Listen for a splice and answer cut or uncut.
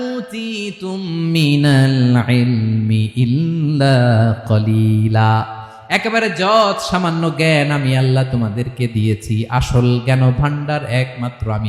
uncut